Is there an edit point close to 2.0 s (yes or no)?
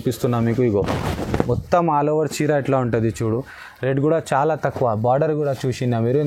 no